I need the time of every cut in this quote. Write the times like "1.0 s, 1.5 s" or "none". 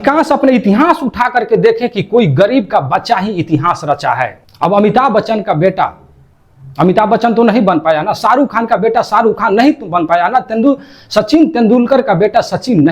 4.4 s